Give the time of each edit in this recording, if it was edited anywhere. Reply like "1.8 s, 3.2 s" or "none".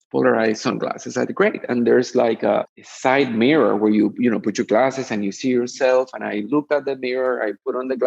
2.8 s